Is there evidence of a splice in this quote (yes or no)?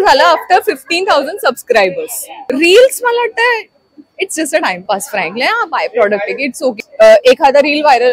yes